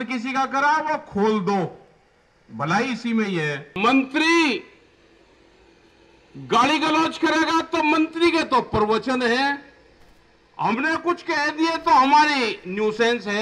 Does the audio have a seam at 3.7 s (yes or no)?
yes